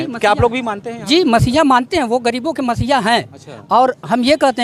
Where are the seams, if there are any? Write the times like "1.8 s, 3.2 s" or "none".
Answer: none